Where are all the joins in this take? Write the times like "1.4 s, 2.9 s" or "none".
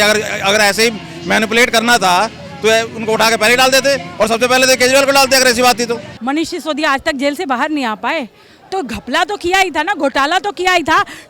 6.1 s